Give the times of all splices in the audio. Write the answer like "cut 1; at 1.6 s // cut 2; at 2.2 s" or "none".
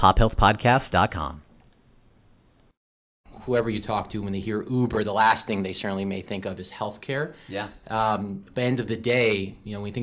cut 1; at 3.2 s